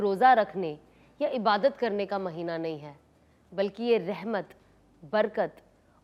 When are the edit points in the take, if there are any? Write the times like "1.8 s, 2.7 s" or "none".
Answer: none